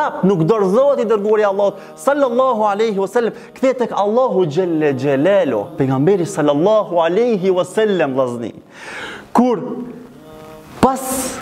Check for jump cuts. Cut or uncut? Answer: cut